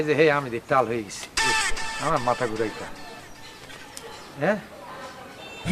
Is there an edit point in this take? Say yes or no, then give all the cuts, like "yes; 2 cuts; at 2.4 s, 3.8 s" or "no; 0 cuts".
no; 0 cuts